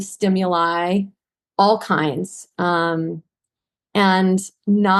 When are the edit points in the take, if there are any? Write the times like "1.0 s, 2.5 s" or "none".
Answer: none